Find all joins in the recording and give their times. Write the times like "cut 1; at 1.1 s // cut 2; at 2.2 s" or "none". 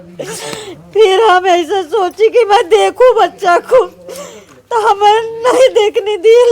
none